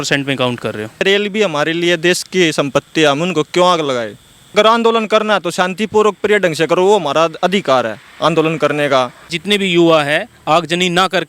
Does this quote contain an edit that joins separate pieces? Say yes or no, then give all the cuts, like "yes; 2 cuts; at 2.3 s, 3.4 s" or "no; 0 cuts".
yes; 3 cuts; at 1.0 s, 4.5 s, 9.4 s